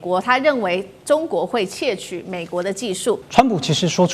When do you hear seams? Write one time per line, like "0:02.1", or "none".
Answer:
0:03.2